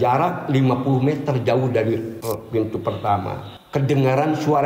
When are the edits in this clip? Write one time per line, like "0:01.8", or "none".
0:02.1
0:03.5